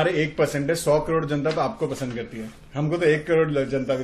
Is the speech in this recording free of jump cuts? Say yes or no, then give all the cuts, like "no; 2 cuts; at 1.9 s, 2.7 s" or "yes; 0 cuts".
yes; 0 cuts